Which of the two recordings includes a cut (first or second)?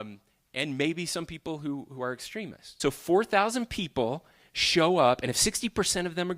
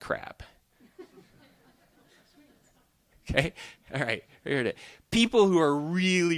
first